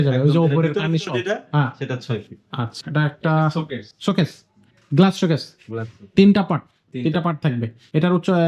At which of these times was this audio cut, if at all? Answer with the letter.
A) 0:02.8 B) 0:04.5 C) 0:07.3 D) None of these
A